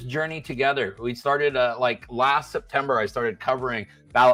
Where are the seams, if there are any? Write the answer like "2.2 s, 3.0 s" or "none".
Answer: none

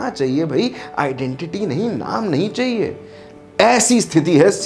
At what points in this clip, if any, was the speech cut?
none

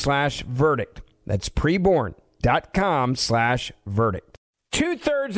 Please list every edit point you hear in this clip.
4.3 s

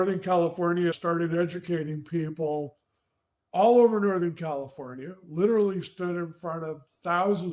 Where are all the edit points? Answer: 1.0 s

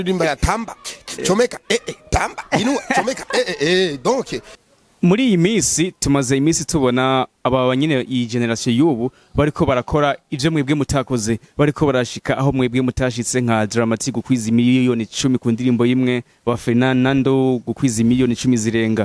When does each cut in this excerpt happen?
4.5 s

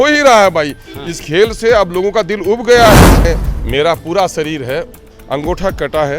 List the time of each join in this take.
3.1 s

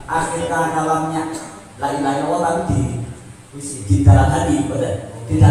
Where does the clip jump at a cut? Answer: none

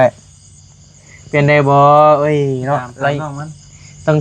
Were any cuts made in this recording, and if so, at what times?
none

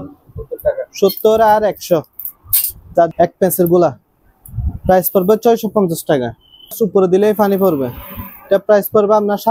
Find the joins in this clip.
3.1 s, 6.8 s

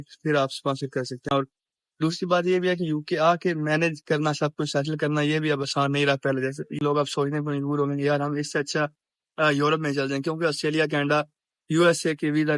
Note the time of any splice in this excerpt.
1.3 s, 6.8 s

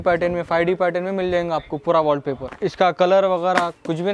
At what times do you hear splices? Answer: 2.5 s

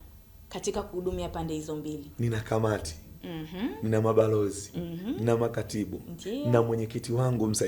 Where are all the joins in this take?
2.1 s

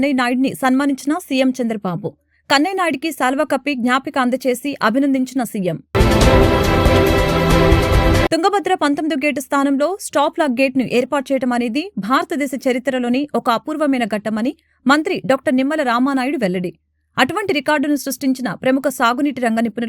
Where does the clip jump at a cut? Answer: none

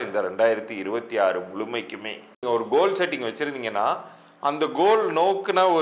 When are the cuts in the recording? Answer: 2.4 s

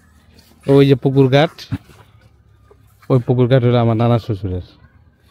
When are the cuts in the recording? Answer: none

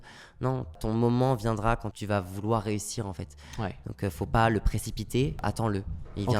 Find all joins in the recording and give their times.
0.8 s, 1.9 s, 5.4 s

